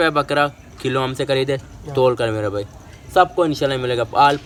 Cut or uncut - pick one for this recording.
uncut